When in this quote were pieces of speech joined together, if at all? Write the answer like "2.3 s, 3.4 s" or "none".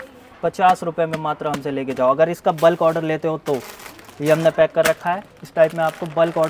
none